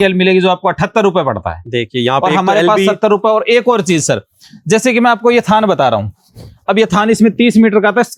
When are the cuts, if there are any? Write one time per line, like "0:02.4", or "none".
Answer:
none